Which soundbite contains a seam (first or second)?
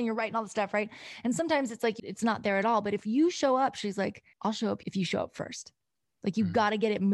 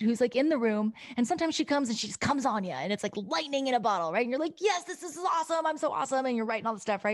first